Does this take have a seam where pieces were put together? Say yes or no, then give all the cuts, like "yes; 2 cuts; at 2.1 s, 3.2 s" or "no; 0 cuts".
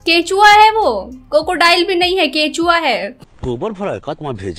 yes; 1 cut; at 3.3 s